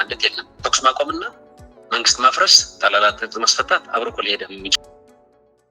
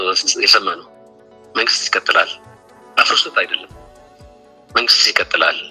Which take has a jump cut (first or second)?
first